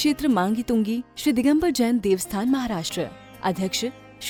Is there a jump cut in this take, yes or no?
no